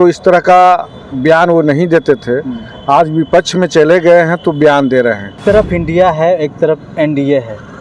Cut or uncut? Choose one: cut